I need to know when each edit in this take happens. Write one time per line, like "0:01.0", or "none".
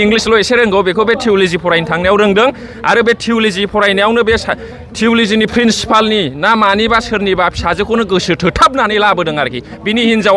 none